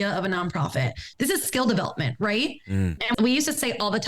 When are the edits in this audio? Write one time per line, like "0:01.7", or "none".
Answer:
0:01.1
0:03.1